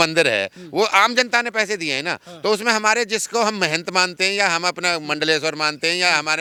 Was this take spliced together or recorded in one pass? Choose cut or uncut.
uncut